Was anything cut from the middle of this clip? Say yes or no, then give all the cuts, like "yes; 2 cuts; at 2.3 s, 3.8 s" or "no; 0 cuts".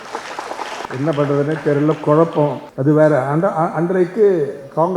yes; 2 cuts; at 0.9 s, 2.7 s